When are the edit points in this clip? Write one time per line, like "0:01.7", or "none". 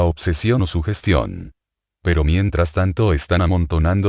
0:02.3